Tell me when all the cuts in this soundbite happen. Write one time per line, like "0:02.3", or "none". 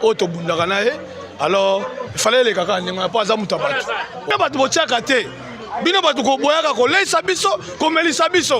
0:04.3

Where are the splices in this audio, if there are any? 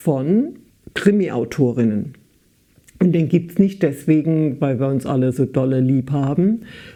none

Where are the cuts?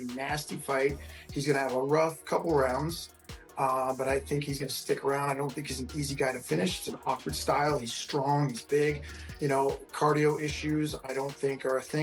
none

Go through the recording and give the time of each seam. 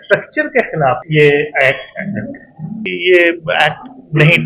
0:01.0
0:02.9

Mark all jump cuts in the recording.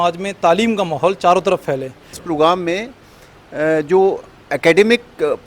0:02.1

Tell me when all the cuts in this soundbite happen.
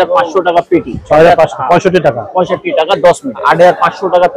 0:03.4

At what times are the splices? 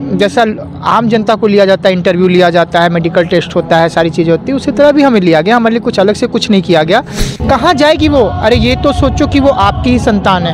0:07.3

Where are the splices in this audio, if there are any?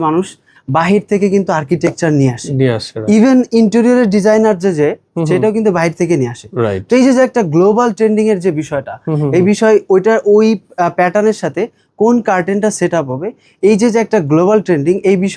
none

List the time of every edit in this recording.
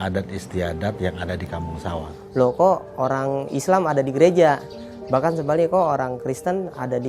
0:02.1

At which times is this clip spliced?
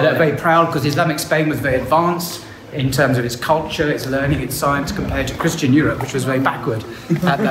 none

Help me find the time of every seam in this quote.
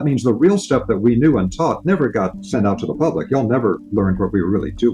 0:02.4

